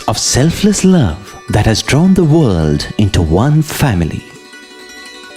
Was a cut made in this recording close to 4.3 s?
yes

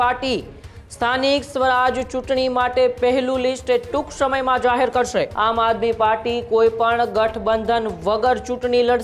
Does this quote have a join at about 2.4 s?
no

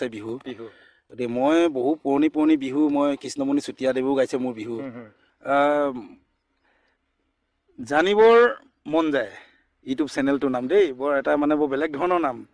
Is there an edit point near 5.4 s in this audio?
yes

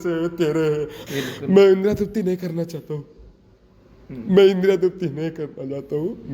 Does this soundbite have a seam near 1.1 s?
yes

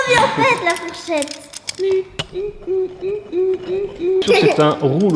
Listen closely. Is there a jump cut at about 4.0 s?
no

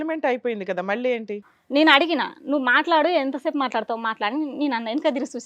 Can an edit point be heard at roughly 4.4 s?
no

